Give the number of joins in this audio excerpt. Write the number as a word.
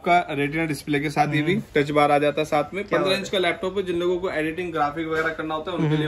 zero